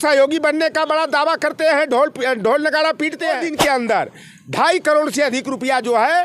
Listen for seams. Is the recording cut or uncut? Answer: cut